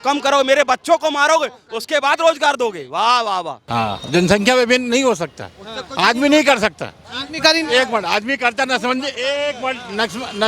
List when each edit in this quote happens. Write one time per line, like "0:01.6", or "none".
0:03.6